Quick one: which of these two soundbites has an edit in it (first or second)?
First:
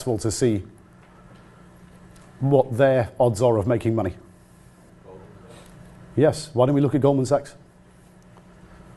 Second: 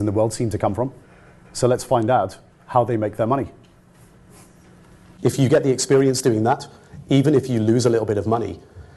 second